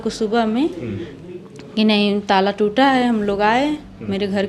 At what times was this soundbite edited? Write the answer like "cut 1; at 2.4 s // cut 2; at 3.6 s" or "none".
none

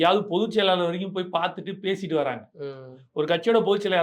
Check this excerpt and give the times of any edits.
none

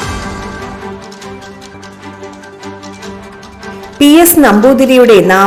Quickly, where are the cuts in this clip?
none

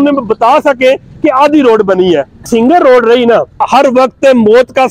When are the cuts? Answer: cut 1; at 2.4 s // cut 2; at 3.6 s

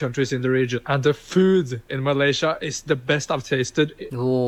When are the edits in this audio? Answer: none

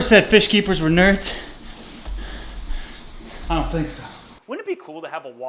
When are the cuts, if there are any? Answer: cut 1; at 4.3 s

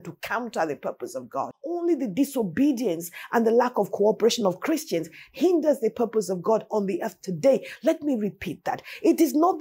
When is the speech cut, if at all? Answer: cut 1; at 1.7 s

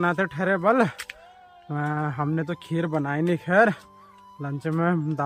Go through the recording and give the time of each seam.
none

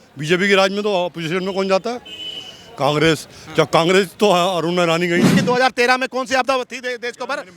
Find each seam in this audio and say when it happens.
cut 1; at 5.4 s

